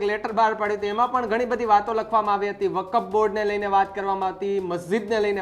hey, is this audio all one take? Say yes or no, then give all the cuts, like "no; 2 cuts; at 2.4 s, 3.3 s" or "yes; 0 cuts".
yes; 0 cuts